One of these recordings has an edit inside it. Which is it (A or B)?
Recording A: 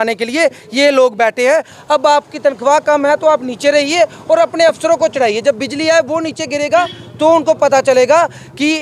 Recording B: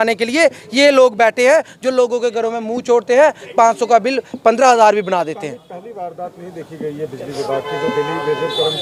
A